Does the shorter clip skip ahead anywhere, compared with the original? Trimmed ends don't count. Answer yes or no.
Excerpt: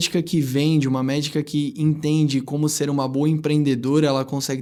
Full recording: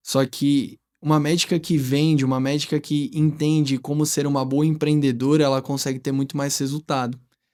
no